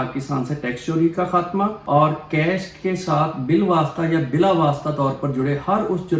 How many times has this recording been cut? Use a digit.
1